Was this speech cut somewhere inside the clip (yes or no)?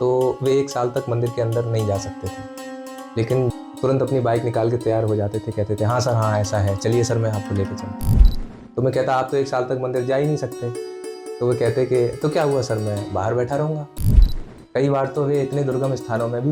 yes